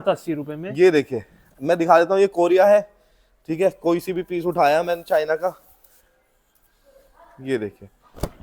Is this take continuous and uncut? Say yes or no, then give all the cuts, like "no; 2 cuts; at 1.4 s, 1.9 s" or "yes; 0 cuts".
yes; 0 cuts